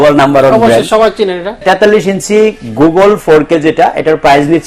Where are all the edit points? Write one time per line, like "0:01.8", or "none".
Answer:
0:01.6